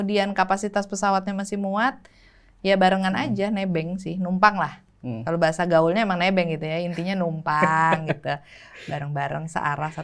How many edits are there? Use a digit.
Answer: 0